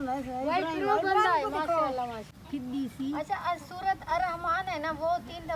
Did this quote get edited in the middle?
yes; 1 cut; at 2.3 s

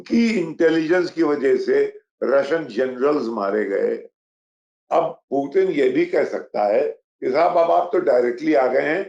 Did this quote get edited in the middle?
no; 0 cuts

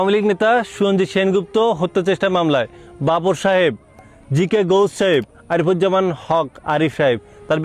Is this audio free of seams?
yes; 0 cuts

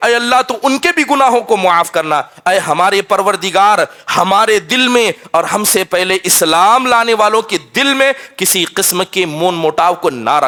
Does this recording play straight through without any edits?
yes; 0 cuts

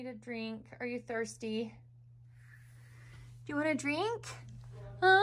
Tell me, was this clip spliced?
no; 0 cuts

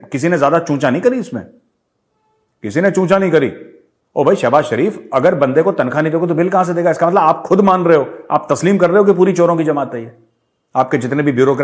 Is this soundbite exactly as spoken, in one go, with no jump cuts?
yes; 0 cuts

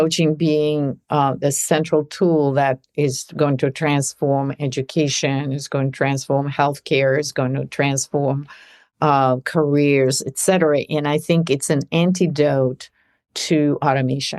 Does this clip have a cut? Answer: no; 0 cuts

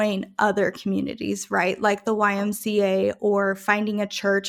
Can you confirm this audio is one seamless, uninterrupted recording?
yes; 0 cuts

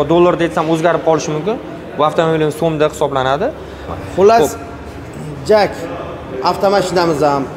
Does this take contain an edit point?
yes; 1 cut; at 3.9 s

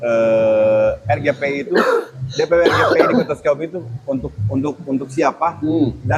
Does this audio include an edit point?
no; 0 cuts

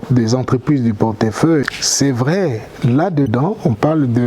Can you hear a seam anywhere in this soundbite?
yes; 1 cut; at 1.6 s

